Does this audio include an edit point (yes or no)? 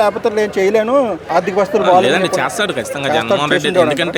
yes